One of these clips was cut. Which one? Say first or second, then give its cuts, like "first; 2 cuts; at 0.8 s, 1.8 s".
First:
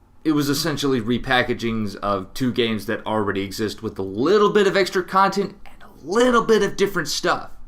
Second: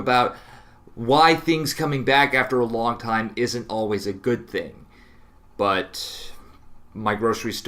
second; 1 cut; at 4.5 s